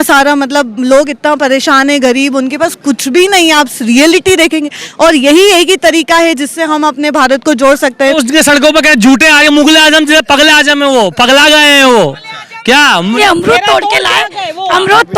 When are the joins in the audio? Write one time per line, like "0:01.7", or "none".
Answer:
0:08.2
0:13.2